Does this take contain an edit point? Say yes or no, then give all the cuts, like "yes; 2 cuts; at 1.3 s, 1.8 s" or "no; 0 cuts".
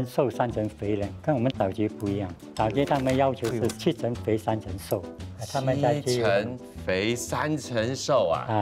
no; 0 cuts